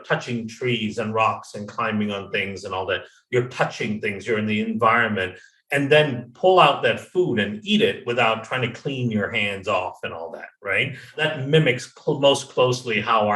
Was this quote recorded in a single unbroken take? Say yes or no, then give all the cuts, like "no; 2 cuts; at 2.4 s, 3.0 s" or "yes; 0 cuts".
no; 1 cut; at 11.2 s